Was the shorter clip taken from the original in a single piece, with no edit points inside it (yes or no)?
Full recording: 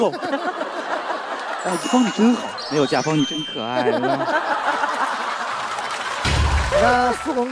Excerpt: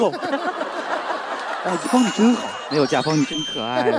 yes